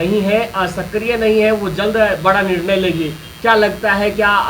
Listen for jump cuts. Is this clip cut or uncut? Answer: uncut